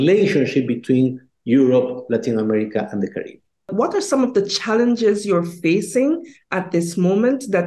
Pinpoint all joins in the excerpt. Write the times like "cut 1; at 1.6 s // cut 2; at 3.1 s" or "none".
cut 1; at 3.7 s